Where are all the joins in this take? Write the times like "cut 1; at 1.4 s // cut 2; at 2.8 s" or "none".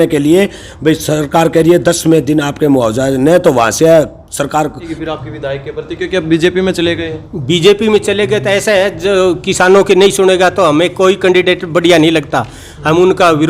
cut 1; at 5.0 s